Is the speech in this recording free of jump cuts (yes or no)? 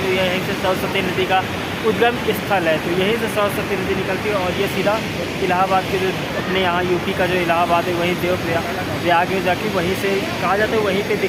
yes